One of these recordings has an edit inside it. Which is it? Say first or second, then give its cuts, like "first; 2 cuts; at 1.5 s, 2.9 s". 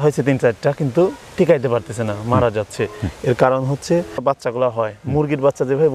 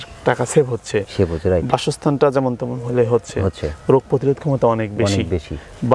first; 1 cut; at 4.1 s